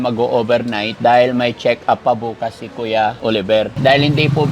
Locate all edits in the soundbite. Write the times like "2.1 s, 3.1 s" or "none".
0.9 s, 3.4 s